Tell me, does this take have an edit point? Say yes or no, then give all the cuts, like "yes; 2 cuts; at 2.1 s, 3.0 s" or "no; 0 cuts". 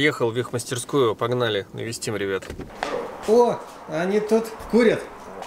yes; 1 cut; at 2.7 s